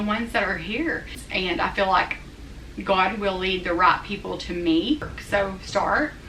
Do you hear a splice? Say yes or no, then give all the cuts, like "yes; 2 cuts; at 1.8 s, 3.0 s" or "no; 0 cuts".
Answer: yes; 2 cuts; at 1.2 s, 5.1 s